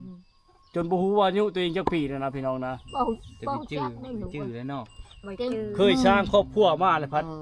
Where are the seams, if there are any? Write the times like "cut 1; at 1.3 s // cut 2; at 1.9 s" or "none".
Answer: none